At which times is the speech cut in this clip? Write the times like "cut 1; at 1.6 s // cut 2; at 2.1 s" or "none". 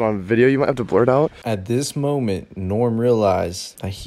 cut 1; at 1.4 s